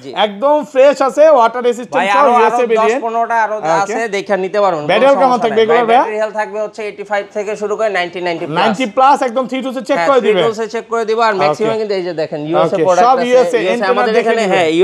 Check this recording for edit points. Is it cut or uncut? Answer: uncut